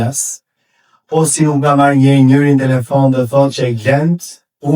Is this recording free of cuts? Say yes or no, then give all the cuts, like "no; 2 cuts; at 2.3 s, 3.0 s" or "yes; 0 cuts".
yes; 0 cuts